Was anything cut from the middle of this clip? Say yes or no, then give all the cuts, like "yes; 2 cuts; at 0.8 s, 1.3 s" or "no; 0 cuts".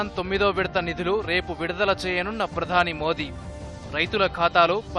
no; 0 cuts